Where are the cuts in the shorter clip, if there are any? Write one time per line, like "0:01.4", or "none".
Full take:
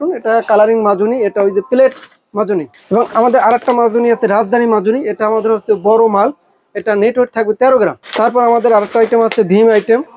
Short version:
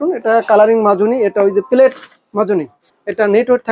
0:02.8